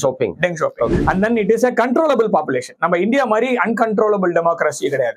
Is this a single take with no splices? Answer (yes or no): no